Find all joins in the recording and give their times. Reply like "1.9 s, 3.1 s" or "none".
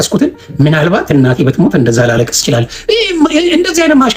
none